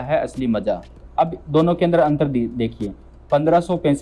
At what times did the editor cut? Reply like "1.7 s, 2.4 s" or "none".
1.0 s